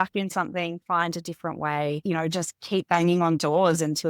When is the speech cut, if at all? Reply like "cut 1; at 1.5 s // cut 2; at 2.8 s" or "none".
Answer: cut 1; at 2.0 s